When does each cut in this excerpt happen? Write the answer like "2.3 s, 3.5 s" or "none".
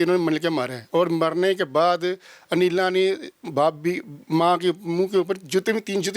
none